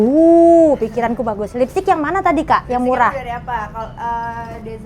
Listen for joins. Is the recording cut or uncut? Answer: uncut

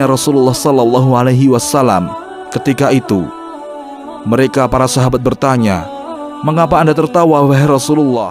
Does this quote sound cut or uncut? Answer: uncut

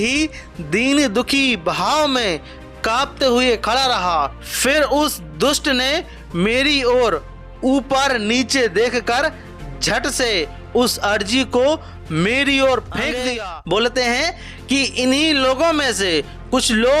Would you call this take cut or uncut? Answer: cut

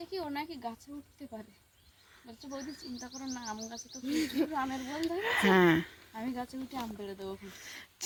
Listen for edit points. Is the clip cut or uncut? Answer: uncut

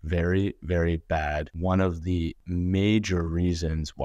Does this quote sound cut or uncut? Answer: cut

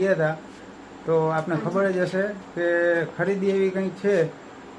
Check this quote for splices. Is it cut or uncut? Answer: uncut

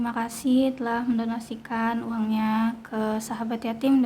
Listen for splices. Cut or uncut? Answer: uncut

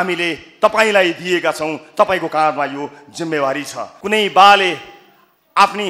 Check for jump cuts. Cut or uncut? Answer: cut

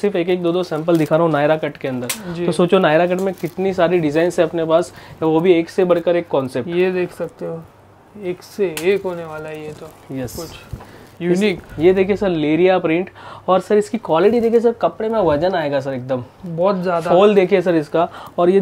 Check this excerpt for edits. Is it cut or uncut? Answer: uncut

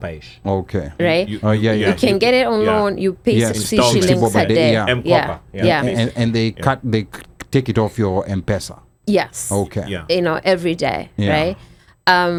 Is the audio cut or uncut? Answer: uncut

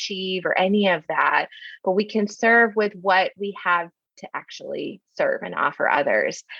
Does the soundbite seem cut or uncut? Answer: uncut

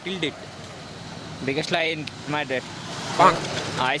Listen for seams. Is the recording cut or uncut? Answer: uncut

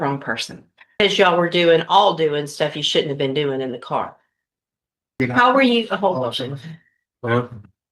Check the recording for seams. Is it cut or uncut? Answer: cut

